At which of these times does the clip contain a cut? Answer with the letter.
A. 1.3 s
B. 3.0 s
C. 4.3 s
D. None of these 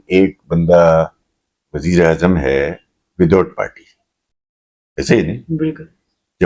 D